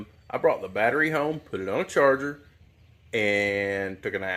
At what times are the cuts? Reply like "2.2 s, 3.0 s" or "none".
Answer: none